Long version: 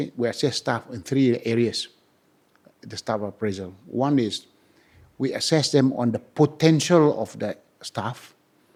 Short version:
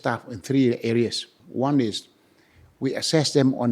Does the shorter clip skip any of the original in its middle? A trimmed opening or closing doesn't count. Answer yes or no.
yes